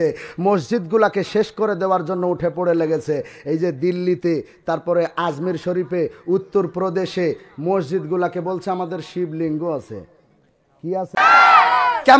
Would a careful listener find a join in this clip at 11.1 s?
yes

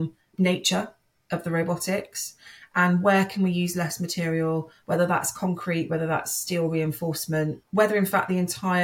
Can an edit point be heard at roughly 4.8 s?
no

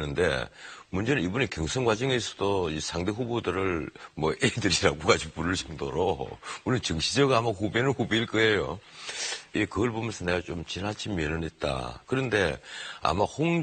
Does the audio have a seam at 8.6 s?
no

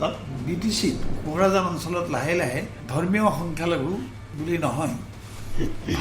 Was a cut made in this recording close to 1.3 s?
no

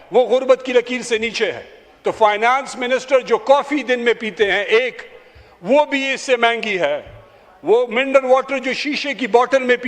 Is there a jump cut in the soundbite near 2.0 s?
yes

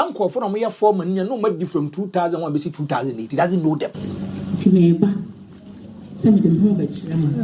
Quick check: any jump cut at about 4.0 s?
yes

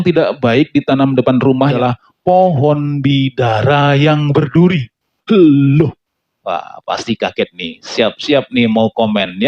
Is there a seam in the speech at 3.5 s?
no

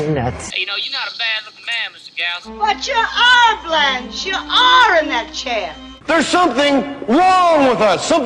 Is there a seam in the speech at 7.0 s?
yes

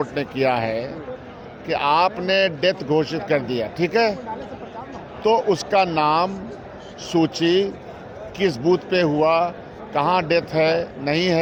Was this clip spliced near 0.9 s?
no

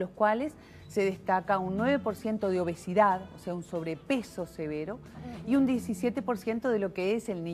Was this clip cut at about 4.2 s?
no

